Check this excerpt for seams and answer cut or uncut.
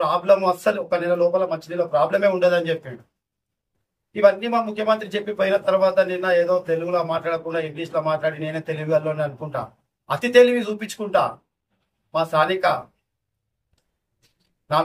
uncut